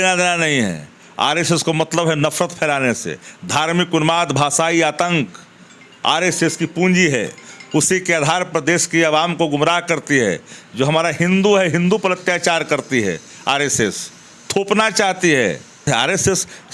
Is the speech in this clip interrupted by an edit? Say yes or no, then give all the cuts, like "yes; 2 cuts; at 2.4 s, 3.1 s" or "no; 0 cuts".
yes; 1 cut; at 15.9 s